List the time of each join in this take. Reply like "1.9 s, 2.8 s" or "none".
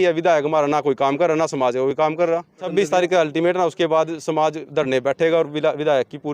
2.6 s